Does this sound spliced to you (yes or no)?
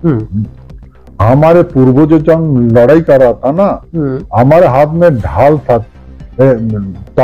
no